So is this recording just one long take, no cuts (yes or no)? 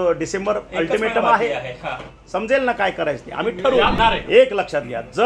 no